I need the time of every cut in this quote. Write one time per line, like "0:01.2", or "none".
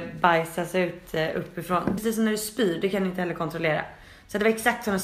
0:02.0